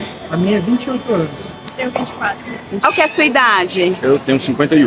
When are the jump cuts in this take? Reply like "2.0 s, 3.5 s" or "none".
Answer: 2.8 s